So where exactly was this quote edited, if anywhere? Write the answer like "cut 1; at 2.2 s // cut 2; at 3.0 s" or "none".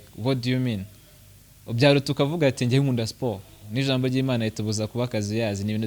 cut 1; at 3.7 s